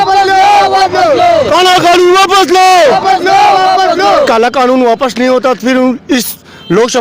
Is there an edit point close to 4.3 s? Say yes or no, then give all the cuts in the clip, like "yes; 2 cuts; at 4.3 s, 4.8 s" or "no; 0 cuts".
yes; 1 cut; at 4.3 s